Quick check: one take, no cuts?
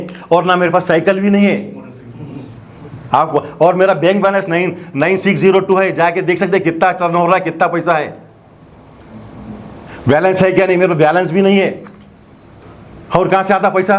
yes; 0 cuts

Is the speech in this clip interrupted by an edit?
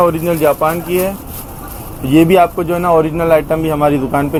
no; 0 cuts

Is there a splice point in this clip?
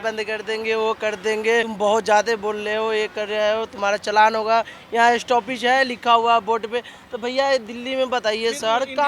yes; 1 cut; at 1.7 s

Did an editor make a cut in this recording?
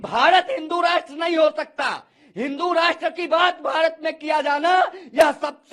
no; 0 cuts

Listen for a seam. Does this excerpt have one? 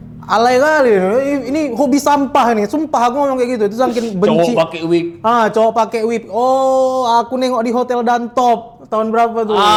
no; 0 cuts

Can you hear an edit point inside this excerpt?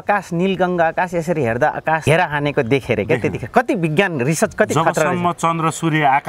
yes; 1 cut; at 2.0 s

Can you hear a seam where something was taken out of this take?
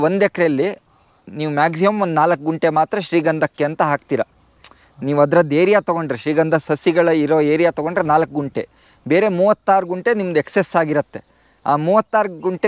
no; 0 cuts

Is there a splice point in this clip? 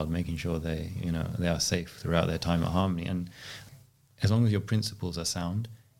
yes; 1 cut; at 3.6 s

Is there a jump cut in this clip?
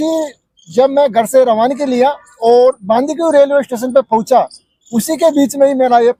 no; 0 cuts

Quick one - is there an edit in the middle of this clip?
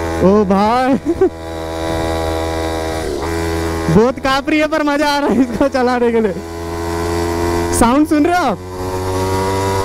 no; 0 cuts

